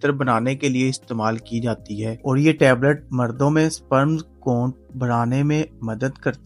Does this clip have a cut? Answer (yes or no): no